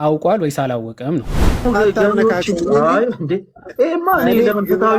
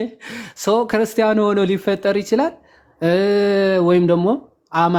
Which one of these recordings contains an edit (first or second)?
first